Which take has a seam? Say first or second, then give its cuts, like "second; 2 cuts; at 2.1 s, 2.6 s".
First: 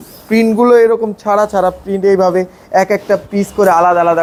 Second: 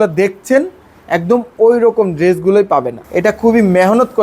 second; 1 cut; at 3.0 s